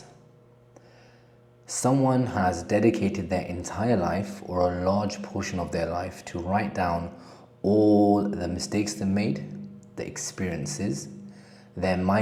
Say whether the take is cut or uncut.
uncut